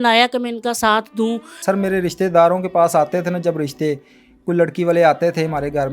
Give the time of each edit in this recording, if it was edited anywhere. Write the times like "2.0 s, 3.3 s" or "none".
1.5 s